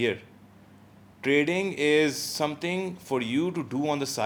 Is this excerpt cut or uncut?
uncut